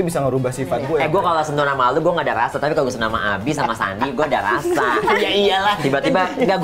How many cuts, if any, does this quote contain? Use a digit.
1